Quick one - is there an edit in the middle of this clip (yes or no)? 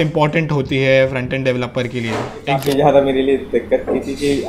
yes